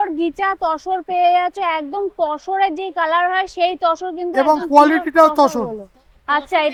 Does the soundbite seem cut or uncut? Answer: uncut